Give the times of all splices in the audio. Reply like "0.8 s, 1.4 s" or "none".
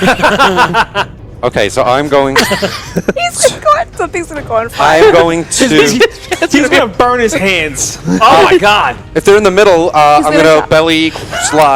1.2 s